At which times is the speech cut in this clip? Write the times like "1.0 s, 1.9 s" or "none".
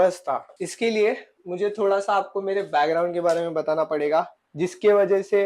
4.4 s